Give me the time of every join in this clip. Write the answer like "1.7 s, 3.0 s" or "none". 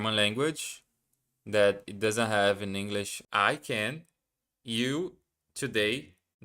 3.2 s